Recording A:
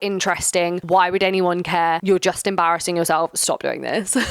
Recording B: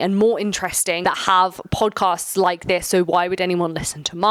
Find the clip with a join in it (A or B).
A